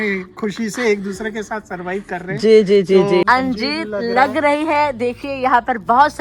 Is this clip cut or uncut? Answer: cut